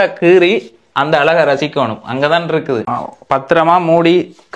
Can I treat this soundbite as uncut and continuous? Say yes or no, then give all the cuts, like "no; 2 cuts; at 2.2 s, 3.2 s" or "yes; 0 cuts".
no; 1 cut; at 3.0 s